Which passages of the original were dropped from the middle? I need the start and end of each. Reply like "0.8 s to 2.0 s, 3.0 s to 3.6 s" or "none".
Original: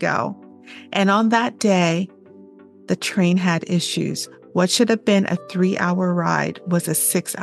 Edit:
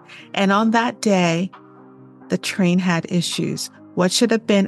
none